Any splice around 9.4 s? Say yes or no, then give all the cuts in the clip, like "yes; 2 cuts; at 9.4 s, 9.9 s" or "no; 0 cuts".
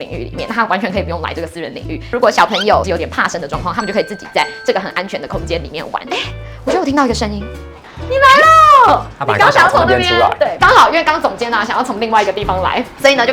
no; 1 cut; at 6.0 s